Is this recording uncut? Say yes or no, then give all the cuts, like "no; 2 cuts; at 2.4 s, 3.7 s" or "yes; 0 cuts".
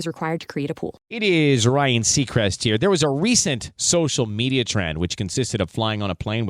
no; 1 cut; at 1.1 s